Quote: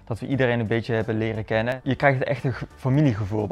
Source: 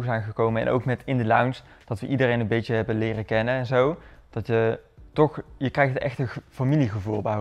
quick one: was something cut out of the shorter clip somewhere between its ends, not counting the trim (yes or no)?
yes